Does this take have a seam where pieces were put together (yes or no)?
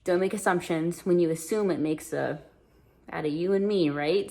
no